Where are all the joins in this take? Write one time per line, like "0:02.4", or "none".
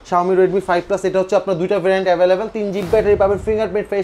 0:02.8